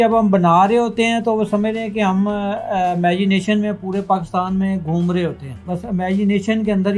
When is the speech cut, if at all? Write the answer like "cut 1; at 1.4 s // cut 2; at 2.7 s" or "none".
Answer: cut 1; at 5.6 s